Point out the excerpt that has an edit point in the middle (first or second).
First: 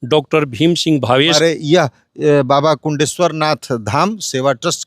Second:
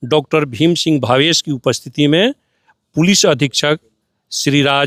first